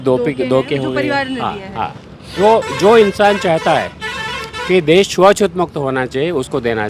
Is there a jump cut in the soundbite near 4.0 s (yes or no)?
no